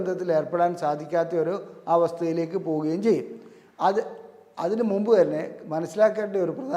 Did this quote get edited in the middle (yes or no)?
no